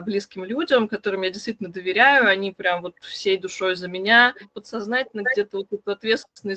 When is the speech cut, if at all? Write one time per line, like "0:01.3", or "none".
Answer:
0:04.5